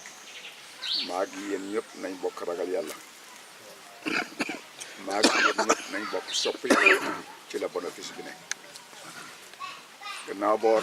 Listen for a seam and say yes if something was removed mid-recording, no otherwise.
no